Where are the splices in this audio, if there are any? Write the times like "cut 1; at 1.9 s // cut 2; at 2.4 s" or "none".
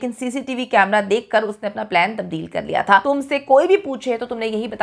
cut 1; at 3.0 s